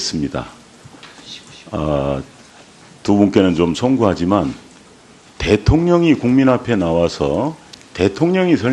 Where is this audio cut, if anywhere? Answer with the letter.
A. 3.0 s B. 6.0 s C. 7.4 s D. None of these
D